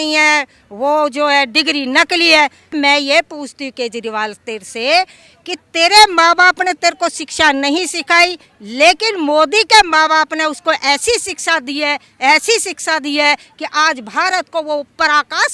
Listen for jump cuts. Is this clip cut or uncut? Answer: uncut